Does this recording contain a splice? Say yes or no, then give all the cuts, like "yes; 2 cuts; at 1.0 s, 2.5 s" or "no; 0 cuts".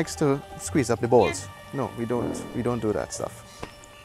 no; 0 cuts